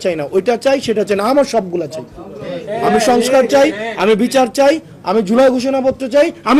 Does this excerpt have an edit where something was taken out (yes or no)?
no